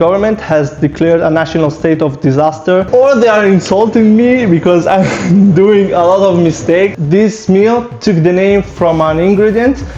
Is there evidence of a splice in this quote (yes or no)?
yes